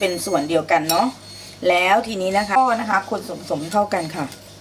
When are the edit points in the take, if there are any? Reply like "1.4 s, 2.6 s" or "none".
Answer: 2.6 s